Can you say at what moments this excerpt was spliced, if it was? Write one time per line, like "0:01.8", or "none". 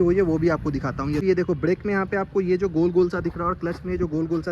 0:01.2